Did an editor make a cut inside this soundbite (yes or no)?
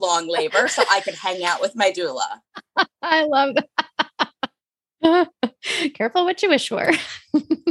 no